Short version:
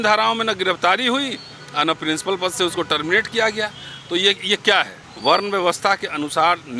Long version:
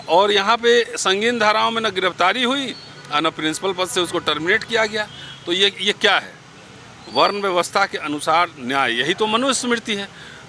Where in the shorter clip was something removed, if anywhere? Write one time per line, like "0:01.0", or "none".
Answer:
0:05.0